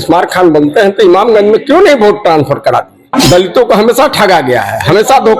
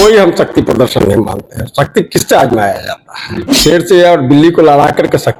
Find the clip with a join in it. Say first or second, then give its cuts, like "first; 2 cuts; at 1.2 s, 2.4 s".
first; 1 cut; at 3.1 s